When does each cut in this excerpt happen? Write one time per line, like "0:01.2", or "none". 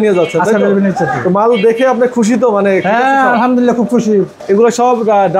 0:04.4